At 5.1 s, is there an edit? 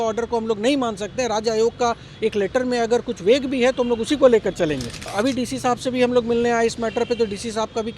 yes; 1 cut; at 5.1 s

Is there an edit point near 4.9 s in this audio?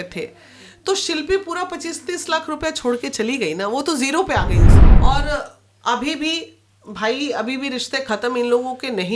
yes; 1 cut; at 4.9 s

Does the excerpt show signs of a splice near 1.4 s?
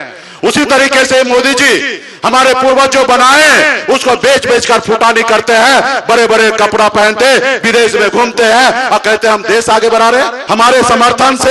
no; 1 cut; at 10.4 s

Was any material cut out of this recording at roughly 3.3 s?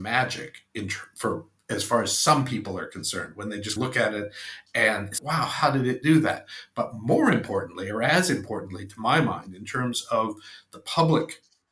no; 0 cuts

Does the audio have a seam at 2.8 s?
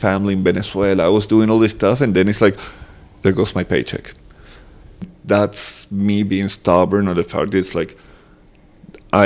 no; 1 cut; at 5.1 s

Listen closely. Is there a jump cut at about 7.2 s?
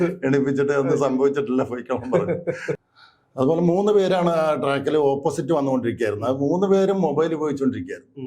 no; 1 cut; at 2.9 s

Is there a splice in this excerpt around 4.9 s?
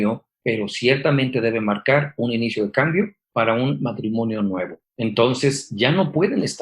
yes; 1 cut; at 4.9 s

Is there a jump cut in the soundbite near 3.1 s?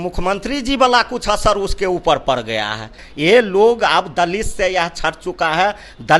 yes; 1 cut; at 3.1 s

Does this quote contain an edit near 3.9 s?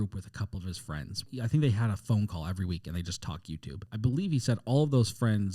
yes; 2 cuts; at 1.3 s, 3.9 s

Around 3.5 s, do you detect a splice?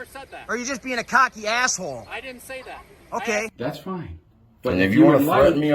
yes; 1 cut; at 3.5 s

